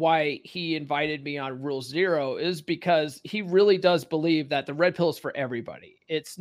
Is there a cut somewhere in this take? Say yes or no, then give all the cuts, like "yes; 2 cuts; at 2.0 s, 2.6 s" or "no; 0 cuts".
no; 0 cuts